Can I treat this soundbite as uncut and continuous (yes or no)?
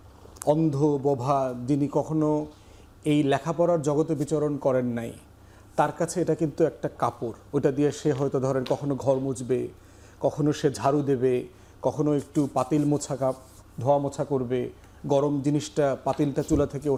yes